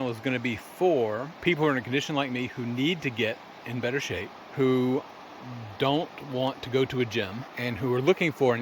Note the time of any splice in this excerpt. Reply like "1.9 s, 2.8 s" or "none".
1.3 s, 4.4 s, 7.4 s